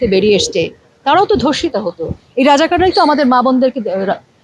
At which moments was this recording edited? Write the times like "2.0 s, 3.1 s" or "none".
none